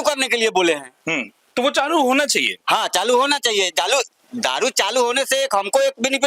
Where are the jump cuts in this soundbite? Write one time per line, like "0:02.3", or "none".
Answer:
none